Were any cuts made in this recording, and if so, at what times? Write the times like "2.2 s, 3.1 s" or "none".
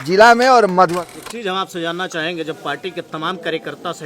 0.9 s